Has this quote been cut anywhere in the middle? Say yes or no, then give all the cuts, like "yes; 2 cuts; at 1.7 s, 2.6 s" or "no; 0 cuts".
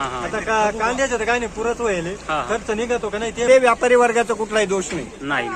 yes; 1 cut; at 3.5 s